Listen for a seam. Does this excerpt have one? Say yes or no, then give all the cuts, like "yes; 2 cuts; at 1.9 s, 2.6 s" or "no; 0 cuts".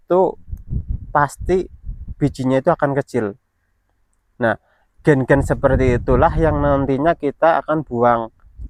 no; 0 cuts